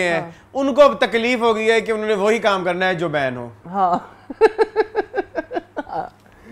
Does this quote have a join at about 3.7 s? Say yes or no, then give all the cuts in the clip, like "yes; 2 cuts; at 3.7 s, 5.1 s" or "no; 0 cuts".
no; 0 cuts